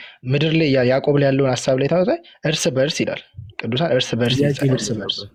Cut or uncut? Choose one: uncut